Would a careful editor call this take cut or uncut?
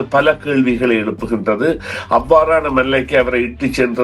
uncut